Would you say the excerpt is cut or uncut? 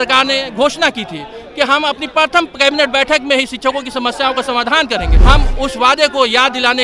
cut